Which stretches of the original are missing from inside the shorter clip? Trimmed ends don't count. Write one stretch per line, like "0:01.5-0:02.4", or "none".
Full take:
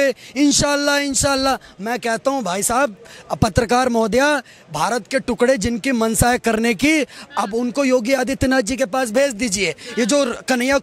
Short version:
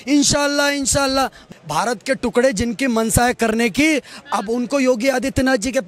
0:01.8-0:04.5